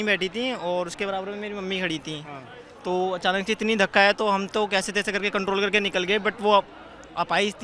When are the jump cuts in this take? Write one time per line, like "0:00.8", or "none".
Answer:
none